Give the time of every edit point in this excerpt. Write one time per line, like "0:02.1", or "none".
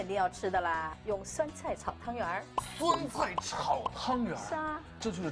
0:00.9